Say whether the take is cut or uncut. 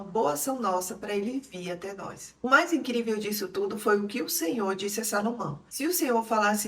cut